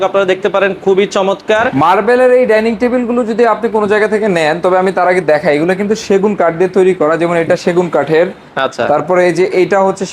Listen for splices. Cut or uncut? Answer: cut